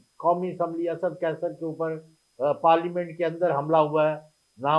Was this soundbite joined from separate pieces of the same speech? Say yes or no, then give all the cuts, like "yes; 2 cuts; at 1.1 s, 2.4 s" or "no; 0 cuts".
no; 0 cuts